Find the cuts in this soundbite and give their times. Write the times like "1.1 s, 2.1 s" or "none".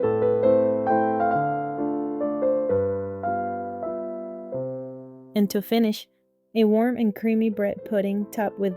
5.1 s